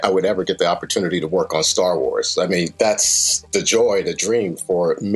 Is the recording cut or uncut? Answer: uncut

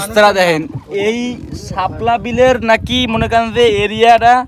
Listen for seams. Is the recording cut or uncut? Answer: uncut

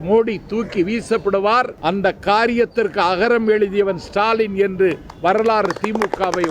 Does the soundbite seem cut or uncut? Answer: cut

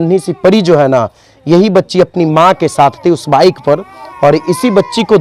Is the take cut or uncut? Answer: uncut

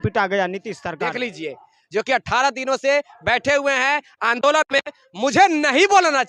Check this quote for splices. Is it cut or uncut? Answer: cut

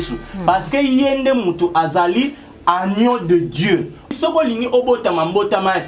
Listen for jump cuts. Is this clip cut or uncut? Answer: cut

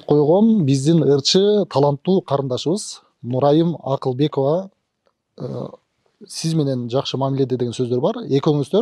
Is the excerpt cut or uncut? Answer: uncut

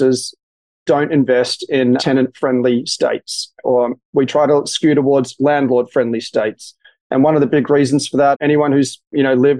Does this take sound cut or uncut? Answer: cut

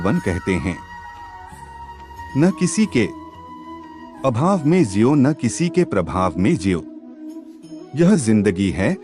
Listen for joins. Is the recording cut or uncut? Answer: uncut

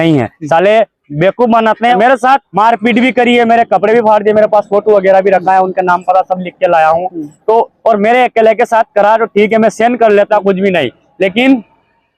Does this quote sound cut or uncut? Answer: cut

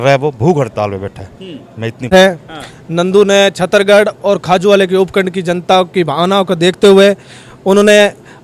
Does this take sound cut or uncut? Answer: cut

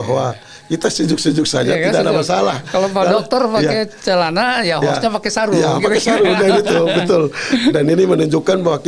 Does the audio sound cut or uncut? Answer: uncut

